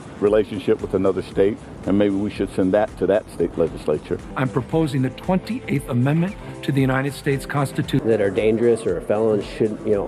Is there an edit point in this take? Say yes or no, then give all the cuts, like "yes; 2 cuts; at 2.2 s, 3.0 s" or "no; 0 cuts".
no; 0 cuts